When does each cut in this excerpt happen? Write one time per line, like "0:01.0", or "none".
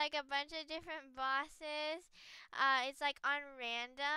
none